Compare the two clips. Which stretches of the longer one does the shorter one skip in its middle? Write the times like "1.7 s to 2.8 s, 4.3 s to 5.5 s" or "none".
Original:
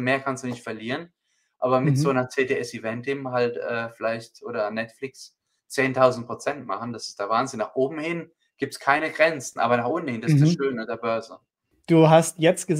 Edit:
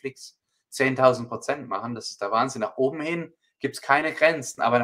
none